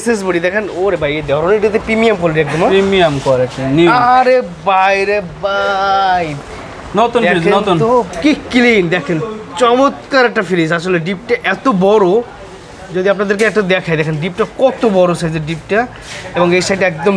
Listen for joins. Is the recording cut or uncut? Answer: uncut